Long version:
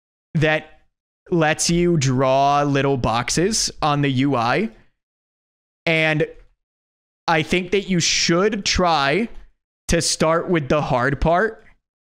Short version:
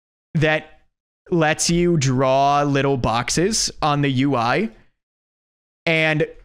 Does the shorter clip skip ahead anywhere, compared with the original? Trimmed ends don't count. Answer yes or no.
no